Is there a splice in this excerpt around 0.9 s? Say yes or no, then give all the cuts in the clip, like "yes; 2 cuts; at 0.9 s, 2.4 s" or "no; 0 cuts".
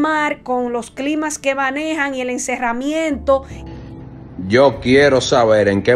no; 1 cut; at 3.6 s